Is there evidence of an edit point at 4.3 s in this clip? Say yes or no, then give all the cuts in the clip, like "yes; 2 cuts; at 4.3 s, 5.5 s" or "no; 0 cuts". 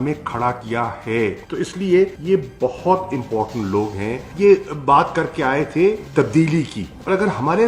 yes; 1 cut; at 4.3 s